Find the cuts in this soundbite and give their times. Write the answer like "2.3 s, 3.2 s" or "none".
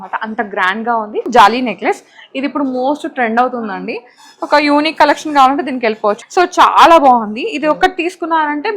1.3 s, 6.2 s